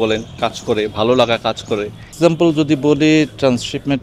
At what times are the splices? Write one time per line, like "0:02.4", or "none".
0:02.1